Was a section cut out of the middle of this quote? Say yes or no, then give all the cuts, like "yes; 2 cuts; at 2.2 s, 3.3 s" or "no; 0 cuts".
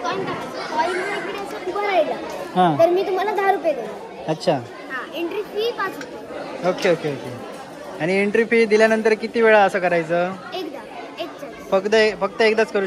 no; 0 cuts